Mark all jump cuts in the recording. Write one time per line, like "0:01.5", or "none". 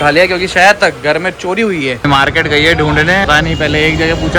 0:02.0
0:03.3